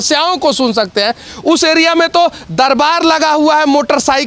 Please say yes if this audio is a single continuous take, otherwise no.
yes